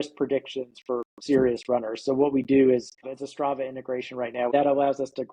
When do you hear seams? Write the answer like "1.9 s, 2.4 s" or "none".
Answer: 3.2 s, 4.5 s